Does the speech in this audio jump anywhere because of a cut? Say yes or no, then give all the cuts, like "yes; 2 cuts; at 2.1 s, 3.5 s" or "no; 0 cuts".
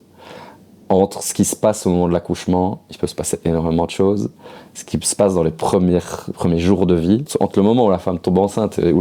yes; 1 cut; at 7.3 s